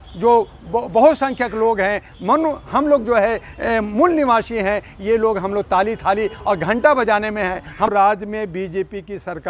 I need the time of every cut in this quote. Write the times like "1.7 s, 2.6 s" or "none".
7.9 s